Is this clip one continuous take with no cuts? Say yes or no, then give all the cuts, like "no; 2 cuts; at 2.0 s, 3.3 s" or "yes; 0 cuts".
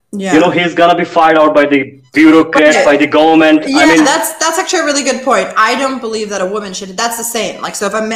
yes; 0 cuts